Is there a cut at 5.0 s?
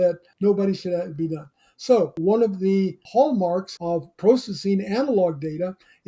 no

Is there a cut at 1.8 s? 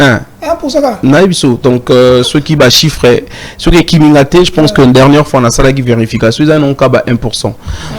no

